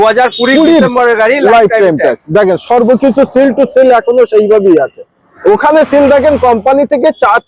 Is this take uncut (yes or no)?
yes